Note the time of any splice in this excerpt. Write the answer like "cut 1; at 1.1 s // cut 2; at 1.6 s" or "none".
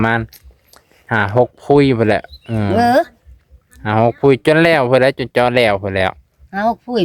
none